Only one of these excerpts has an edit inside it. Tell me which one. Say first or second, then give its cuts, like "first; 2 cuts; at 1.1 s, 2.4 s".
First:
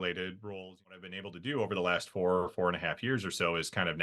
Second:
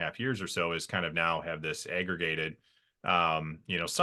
first; 1 cut; at 1.1 s